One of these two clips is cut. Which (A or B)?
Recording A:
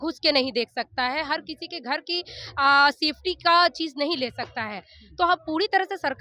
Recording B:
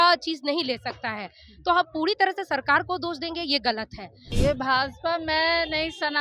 B